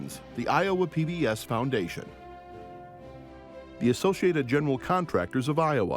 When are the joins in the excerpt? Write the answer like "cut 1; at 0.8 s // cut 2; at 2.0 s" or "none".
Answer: cut 1; at 2.1 s // cut 2; at 3.8 s